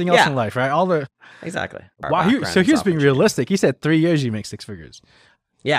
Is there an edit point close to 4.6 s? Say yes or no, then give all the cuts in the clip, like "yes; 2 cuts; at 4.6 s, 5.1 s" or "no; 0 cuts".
no; 1 cut; at 1.9 s